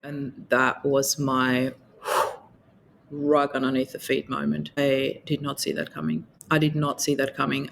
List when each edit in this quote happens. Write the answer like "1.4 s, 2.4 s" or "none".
4.8 s, 6.3 s